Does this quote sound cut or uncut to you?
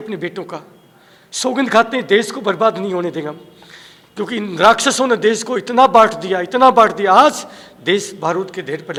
uncut